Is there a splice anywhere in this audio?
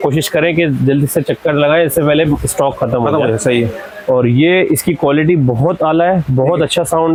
no; 0 cuts

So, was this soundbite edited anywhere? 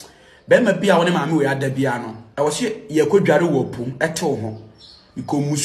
yes; 1 cut; at 2.2 s

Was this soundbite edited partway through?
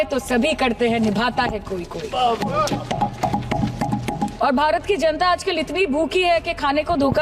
yes; 1 cut; at 4.3 s

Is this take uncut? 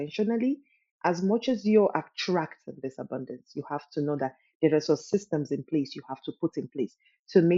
yes; 0 cuts

